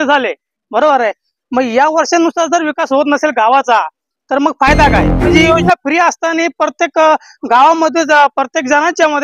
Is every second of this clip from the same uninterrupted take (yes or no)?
no